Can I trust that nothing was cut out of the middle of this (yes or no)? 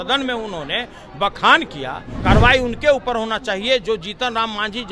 no